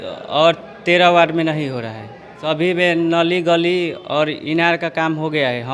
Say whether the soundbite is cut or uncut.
uncut